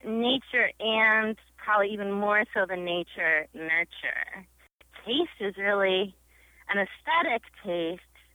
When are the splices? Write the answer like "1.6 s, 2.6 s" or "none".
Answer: 4.9 s